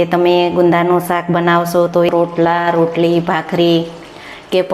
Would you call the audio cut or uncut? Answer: cut